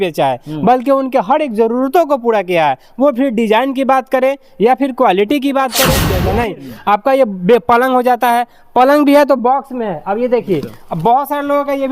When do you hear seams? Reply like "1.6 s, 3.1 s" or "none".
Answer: 6.1 s